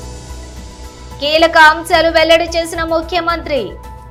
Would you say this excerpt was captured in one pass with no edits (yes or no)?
yes